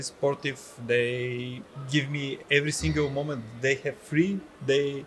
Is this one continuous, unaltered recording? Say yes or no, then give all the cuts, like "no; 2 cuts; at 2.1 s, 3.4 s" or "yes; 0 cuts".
yes; 0 cuts